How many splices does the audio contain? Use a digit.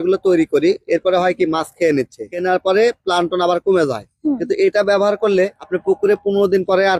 1